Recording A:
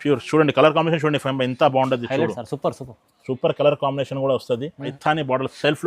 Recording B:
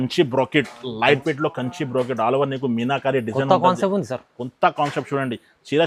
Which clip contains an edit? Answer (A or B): A